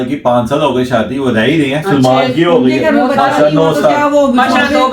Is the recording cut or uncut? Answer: uncut